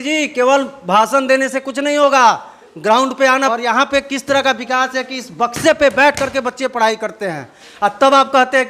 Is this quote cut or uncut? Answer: cut